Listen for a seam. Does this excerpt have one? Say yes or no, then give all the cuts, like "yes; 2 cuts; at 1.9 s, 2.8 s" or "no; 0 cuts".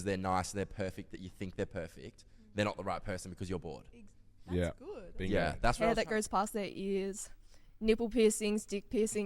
yes; 1 cut; at 5.8 s